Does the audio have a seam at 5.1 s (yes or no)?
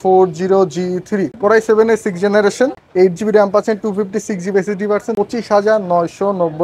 yes